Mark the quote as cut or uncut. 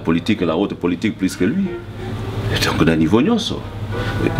uncut